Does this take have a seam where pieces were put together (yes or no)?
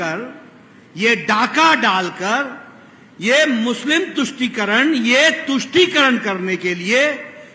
no